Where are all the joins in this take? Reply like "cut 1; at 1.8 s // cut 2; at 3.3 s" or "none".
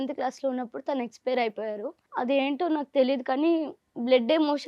cut 1; at 2.0 s